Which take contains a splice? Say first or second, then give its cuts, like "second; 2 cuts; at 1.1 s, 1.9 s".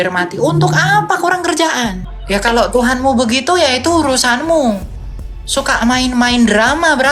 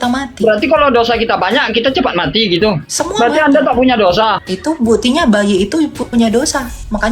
second; 2 cuts; at 2.9 s, 4.5 s